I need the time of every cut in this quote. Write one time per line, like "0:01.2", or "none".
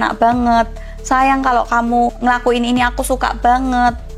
none